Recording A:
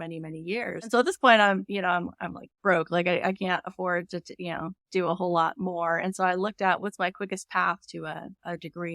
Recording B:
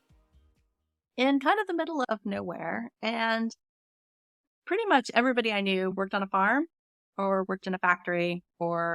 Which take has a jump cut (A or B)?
A